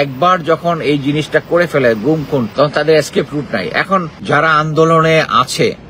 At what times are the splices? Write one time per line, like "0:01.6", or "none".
0:02.5
0:04.1

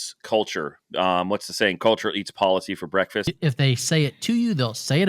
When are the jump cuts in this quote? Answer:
0:03.3

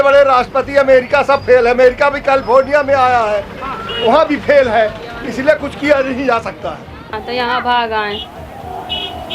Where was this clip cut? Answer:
0:07.2

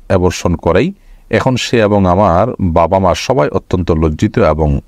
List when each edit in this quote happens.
none

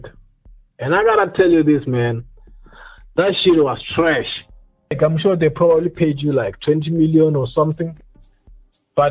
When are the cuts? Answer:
0:05.0

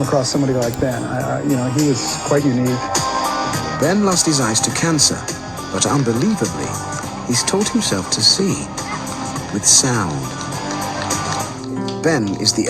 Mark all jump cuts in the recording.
0:11.6

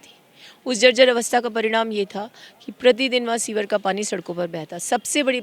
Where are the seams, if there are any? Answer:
none

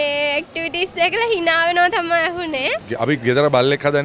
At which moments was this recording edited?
0:02.9

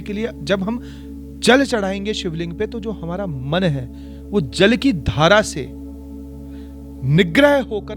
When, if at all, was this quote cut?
none

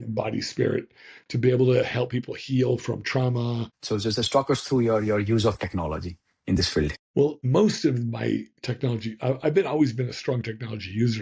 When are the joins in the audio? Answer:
0:03.7
0:07.1

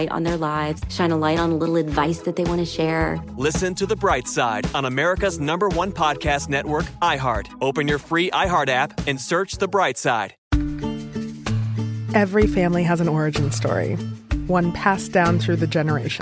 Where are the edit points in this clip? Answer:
0:10.4

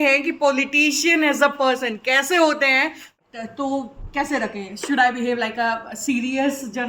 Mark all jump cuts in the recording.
0:03.2

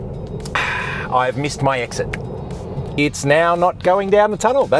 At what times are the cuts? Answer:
0:03.0

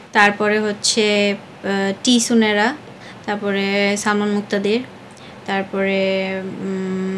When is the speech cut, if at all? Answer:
none

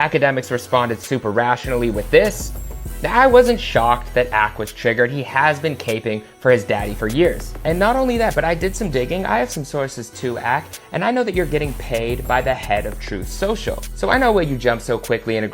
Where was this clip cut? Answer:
0:10.3

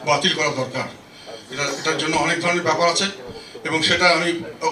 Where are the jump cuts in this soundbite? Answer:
none

